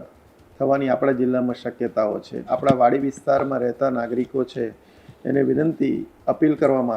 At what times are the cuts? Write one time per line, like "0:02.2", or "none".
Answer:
0:02.5